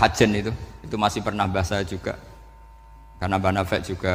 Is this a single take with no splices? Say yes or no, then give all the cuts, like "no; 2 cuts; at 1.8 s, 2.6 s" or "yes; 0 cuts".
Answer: yes; 0 cuts